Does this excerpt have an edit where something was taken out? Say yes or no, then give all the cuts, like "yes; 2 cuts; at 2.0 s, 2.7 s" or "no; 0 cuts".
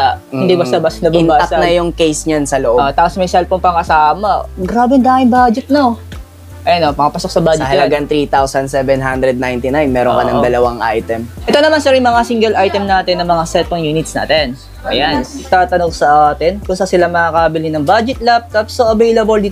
yes; 2 cuts; at 11.4 s, 15.4 s